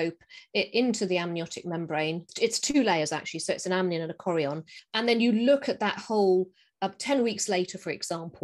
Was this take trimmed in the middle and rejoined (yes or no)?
no